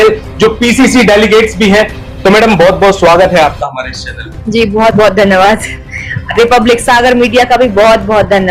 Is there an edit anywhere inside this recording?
no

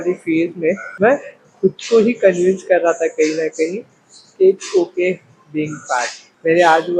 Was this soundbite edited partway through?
no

